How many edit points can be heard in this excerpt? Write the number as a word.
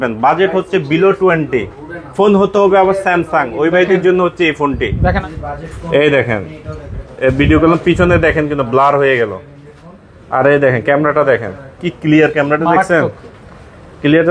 one